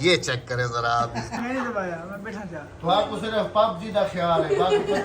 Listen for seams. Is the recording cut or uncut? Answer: cut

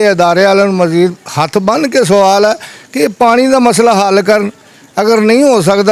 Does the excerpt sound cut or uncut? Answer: uncut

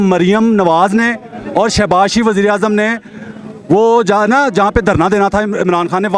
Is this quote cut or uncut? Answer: uncut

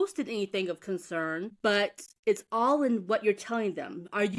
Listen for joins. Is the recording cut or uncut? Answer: cut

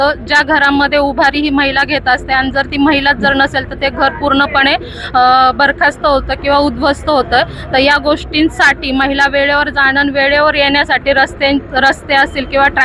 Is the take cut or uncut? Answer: uncut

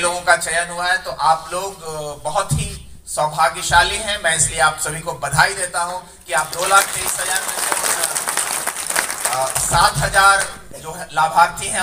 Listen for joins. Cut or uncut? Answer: uncut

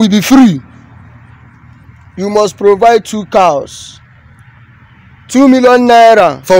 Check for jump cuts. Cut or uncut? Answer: uncut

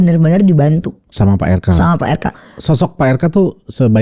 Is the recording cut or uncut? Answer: cut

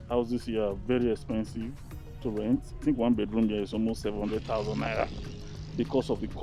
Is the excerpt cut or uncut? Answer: uncut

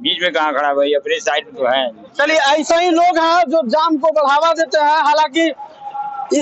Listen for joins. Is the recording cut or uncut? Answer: uncut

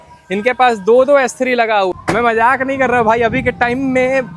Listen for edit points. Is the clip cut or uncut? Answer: cut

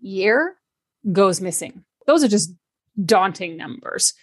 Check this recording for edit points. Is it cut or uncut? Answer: cut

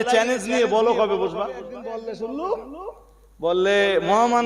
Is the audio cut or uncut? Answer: cut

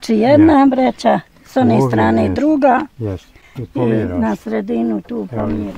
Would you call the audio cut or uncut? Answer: uncut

